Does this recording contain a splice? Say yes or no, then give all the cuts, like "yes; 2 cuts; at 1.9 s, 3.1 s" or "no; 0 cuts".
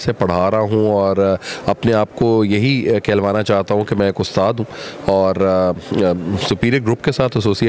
no; 0 cuts